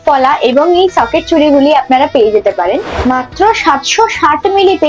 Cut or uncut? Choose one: cut